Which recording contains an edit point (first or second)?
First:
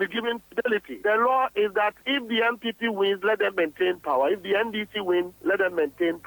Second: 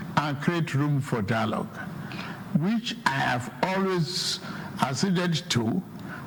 first